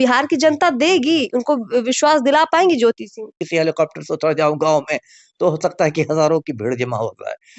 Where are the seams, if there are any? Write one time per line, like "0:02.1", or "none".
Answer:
0:03.4